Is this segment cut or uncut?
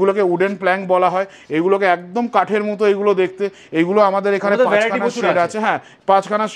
uncut